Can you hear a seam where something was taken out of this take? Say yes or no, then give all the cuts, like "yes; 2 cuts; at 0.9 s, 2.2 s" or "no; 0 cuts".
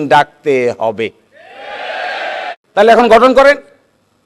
yes; 1 cut; at 2.5 s